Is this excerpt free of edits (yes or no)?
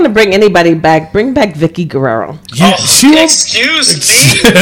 no